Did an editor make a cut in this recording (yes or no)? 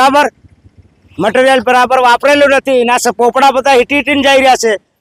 no